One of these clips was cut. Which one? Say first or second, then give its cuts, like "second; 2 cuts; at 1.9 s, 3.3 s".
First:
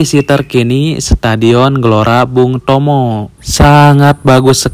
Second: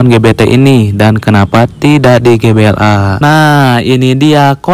second; 1 cut; at 3.2 s